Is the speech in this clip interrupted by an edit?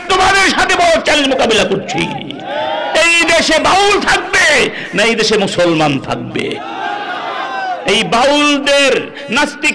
no; 0 cuts

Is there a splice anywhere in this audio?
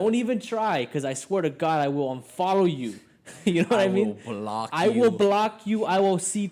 no; 0 cuts

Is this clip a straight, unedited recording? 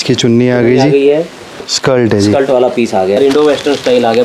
no; 2 cuts; at 1.6 s, 3.2 s

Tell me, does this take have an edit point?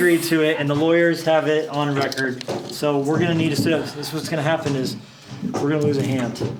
no; 0 cuts

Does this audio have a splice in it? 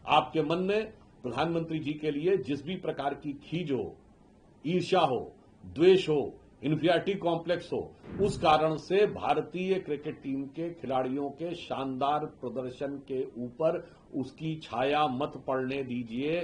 no; 0 cuts

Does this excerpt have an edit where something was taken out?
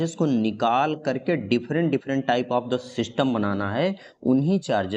no; 0 cuts

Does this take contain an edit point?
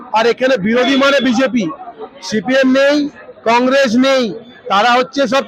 no; 0 cuts

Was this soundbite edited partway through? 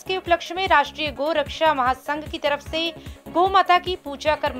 no; 0 cuts

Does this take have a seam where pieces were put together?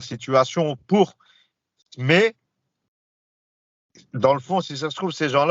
no; 0 cuts

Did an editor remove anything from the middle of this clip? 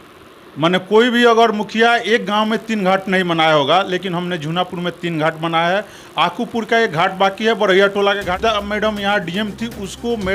yes; 1 cut; at 8.4 s

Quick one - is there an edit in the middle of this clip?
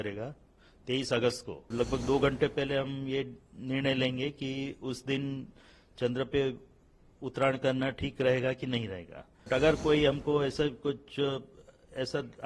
yes; 2 cuts; at 1.7 s, 9.5 s

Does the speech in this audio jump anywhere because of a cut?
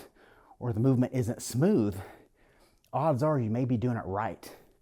no; 0 cuts

